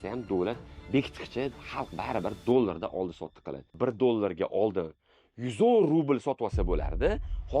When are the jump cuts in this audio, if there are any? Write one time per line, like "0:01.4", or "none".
0:03.7